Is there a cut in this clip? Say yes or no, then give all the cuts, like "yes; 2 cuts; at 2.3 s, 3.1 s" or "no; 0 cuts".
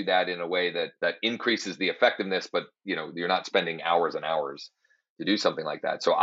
yes; 1 cut; at 0.9 s